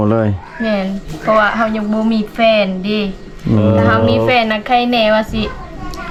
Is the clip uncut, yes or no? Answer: yes